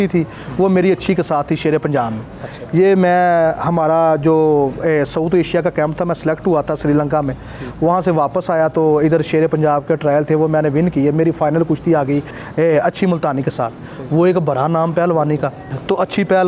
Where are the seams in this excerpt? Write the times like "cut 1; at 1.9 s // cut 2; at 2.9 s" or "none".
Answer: none